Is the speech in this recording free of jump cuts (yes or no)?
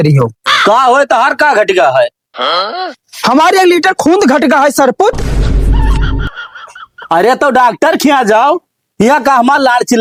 yes